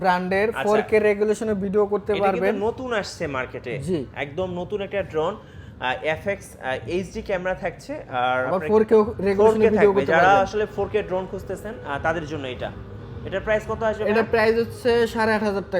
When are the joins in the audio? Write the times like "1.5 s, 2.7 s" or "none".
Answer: none